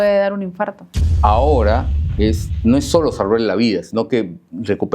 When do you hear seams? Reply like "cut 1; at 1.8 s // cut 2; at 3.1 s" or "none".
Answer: cut 1; at 1.1 s